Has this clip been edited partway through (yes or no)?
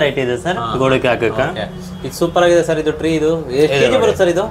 no